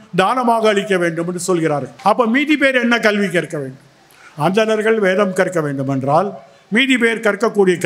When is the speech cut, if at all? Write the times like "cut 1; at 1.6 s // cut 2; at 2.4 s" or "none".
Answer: cut 1; at 1.9 s